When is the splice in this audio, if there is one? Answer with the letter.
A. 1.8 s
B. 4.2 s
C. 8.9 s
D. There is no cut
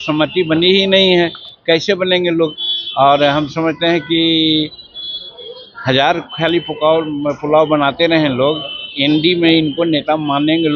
D